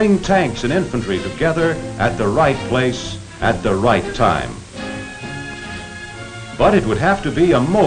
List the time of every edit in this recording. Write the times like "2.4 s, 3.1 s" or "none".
none